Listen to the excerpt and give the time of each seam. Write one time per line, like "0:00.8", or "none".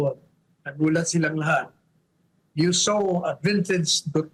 none